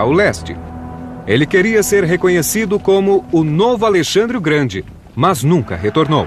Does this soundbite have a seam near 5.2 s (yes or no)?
no